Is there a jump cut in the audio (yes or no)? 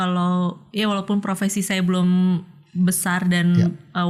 no